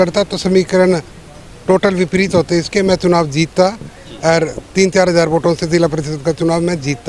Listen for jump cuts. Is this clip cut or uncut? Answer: uncut